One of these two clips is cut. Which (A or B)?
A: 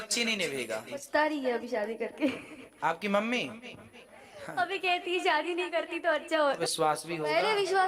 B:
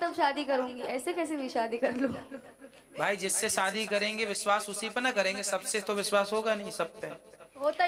A